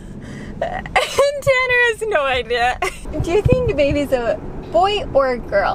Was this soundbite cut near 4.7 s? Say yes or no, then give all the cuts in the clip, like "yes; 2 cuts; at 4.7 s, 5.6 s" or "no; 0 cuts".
no; 1 cut; at 3.1 s